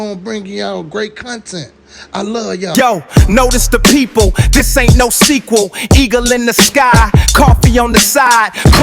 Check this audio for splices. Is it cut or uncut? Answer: cut